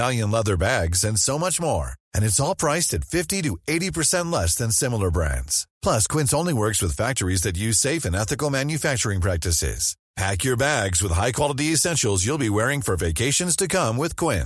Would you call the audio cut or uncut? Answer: uncut